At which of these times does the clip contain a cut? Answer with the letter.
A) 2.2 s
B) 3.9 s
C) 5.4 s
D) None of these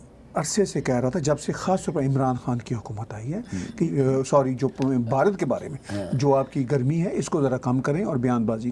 B